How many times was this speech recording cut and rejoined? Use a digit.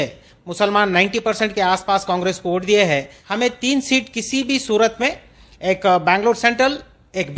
1